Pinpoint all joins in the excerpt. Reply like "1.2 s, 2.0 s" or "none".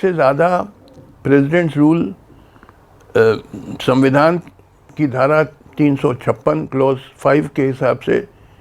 none